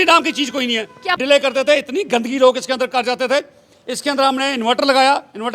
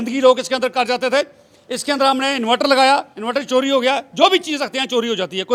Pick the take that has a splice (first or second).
first